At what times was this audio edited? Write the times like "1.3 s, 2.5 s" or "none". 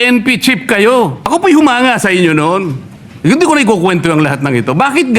1.3 s